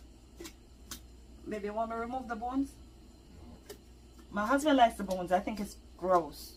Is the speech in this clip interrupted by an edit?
no; 0 cuts

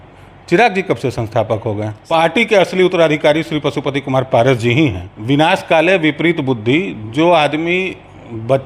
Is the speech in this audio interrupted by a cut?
yes; 2 cuts; at 1.9 s, 5.1 s

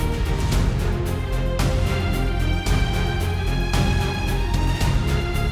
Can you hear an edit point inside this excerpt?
yes; 1 cut; at 4.4 s

